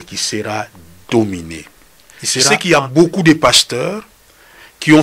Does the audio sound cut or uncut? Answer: cut